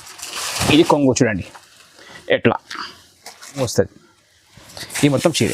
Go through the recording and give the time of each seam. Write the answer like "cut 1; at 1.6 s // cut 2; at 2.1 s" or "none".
cut 1; at 3.6 s